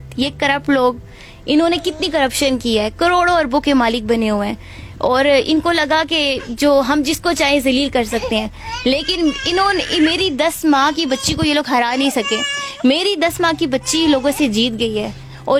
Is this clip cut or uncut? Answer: uncut